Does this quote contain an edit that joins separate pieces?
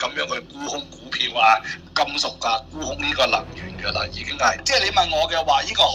yes; 2 cuts; at 1.8 s, 4.6 s

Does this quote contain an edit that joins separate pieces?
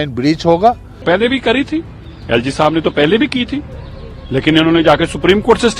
yes; 1 cut; at 0.9 s

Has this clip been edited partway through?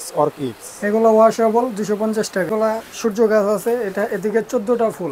yes; 1 cut; at 2.5 s

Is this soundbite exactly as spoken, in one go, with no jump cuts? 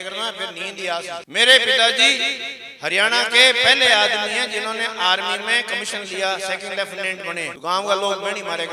no; 2 cuts; at 1.3 s, 7.5 s

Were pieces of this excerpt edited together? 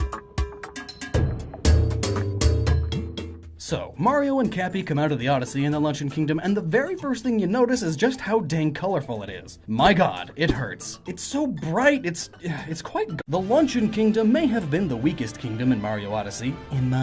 no; 0 cuts

